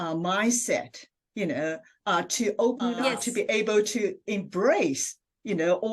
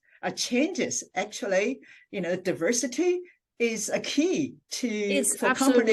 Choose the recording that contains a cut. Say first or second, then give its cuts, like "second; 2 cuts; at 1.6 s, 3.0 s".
first; 1 cut; at 3.0 s